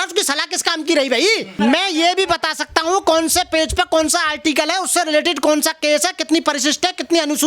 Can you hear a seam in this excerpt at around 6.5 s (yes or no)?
no